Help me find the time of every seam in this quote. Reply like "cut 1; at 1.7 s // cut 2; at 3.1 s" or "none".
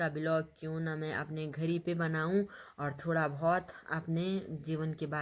none